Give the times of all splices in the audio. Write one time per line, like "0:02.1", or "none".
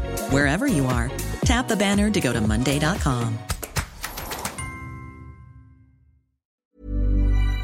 0:06.7

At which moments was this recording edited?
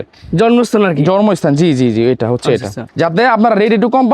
0:02.9

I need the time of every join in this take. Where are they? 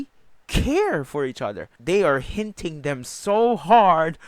0:01.7

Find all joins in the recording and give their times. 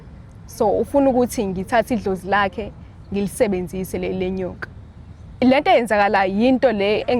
0:05.4

